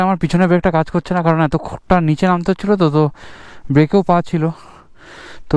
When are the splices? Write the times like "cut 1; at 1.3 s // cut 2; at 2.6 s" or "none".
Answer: none